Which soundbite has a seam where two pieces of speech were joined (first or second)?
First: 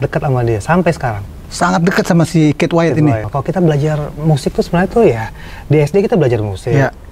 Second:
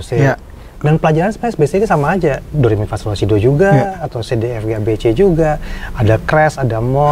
first